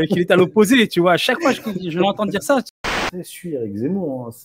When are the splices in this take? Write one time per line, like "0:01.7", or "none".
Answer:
0:02.8